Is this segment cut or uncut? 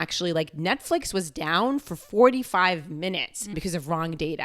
cut